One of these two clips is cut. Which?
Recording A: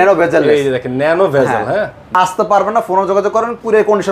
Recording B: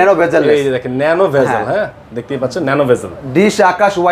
A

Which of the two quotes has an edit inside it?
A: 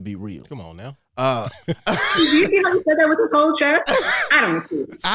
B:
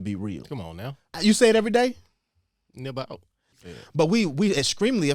B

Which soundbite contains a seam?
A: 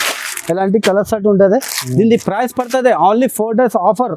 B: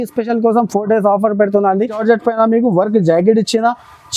B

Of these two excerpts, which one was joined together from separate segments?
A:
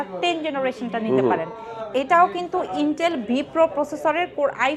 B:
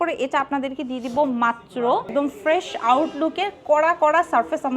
B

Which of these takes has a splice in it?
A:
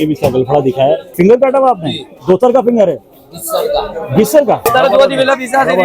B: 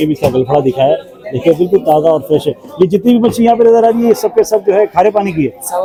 A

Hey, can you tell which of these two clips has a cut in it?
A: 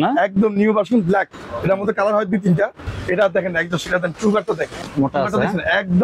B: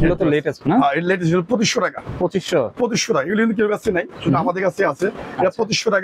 A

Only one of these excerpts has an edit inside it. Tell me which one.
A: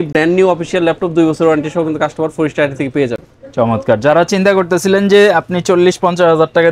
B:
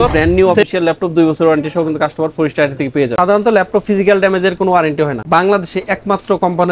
B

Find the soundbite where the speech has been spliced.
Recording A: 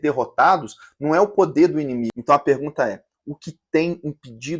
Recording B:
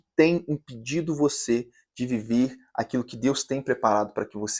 A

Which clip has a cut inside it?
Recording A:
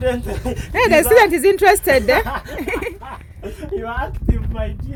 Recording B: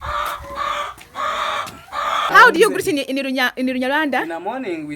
B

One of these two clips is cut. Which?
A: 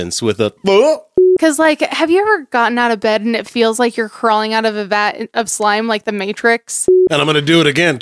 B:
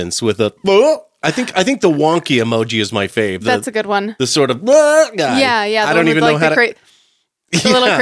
A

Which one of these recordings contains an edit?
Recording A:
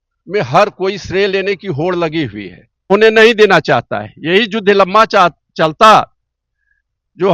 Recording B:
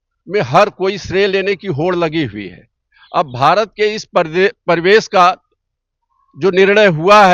A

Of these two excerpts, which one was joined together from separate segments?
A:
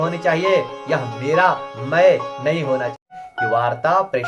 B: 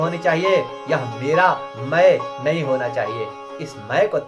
A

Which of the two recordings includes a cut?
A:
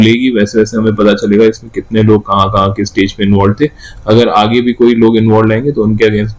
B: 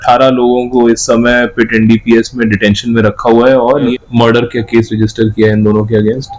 B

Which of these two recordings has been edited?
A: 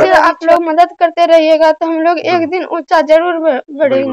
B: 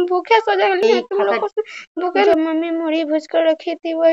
B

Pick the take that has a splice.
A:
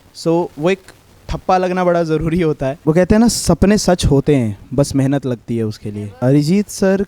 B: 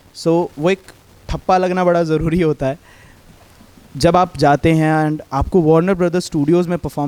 A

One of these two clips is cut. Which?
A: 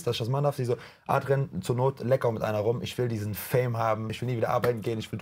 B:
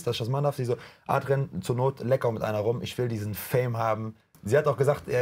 A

